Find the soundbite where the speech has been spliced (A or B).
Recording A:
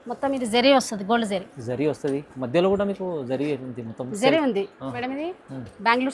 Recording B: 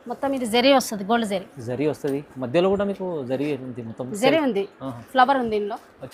A